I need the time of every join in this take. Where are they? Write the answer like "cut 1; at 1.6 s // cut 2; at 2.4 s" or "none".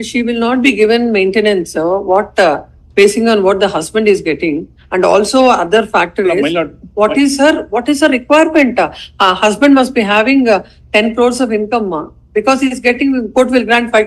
none